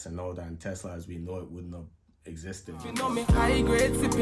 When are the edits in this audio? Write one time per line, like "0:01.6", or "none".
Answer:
0:02.8